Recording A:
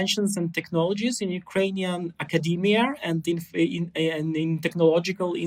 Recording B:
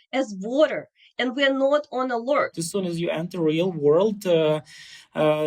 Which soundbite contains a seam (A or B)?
B